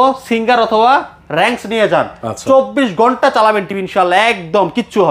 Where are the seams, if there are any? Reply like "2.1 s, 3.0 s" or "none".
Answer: none